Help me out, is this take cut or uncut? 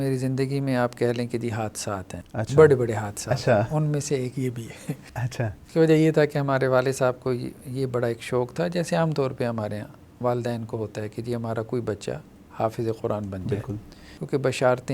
uncut